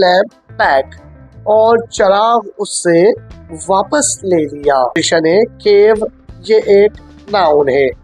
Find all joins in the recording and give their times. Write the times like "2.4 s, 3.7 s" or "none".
5.0 s